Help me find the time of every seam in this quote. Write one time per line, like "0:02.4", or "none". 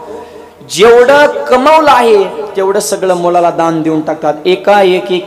none